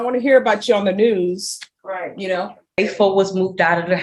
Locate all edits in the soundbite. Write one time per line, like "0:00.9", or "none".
0:02.8